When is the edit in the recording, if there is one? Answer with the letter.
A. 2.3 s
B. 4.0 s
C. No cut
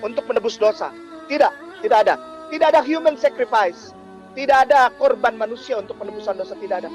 A